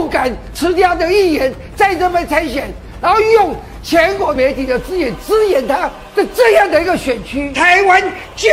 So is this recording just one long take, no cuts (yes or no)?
no